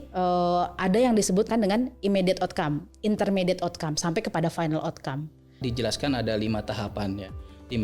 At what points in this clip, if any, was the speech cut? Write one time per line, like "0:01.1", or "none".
0:01.5
0:05.6